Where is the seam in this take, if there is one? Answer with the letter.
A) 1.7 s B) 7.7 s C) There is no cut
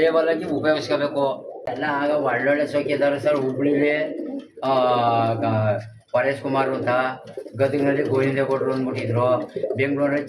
A